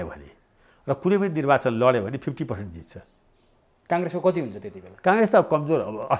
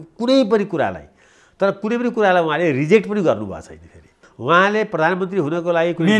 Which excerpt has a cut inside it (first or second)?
second